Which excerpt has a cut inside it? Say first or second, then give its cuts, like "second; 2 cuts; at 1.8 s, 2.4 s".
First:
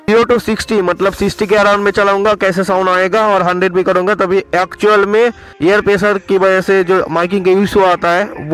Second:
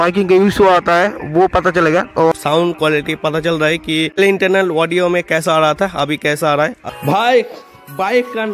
second; 2 cuts; at 2.3 s, 6.8 s